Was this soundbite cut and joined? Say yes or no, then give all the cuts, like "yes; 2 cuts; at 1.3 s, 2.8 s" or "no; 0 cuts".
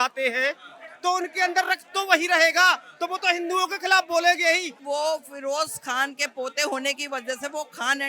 yes; 1 cut; at 4.7 s